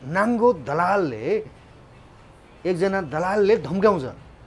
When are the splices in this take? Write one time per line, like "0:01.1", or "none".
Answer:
none

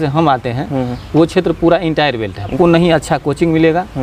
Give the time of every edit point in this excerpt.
0:02.5

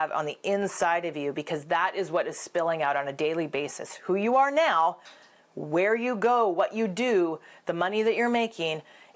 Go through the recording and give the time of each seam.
none

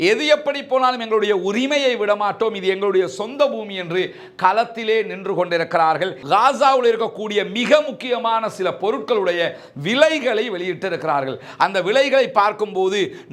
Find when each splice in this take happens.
0:06.1

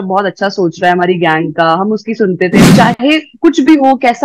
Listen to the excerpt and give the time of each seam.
0:02.7

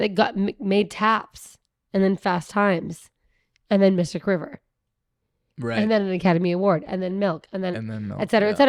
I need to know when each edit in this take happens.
none

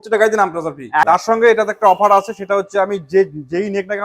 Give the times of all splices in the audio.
0:01.1

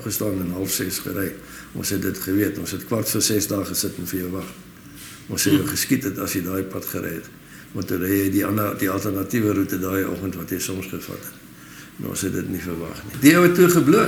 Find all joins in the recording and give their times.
0:13.1

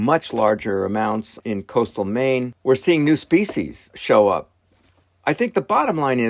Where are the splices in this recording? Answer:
0:01.3
0:02.5
0:03.9

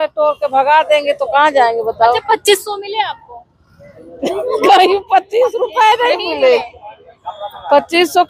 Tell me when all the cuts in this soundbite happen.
none

